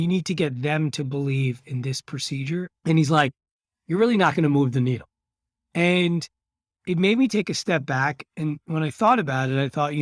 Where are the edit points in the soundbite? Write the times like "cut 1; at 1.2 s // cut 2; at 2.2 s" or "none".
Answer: cut 1; at 2.7 s